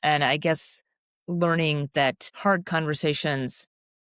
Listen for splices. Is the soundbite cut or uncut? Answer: cut